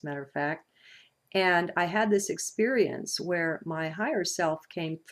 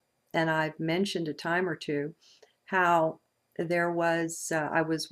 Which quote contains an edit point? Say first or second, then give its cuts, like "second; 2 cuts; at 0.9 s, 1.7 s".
second; 1 cut; at 3.1 s